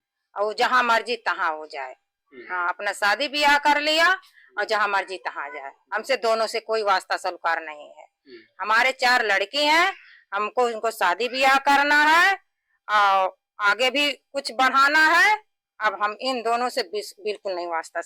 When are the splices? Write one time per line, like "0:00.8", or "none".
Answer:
none